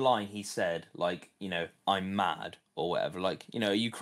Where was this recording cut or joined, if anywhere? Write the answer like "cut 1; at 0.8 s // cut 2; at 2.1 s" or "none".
none